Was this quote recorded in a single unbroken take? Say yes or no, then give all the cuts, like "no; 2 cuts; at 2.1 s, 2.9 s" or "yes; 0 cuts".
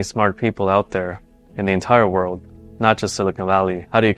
yes; 0 cuts